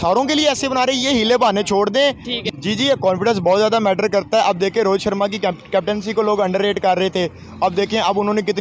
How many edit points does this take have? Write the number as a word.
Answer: one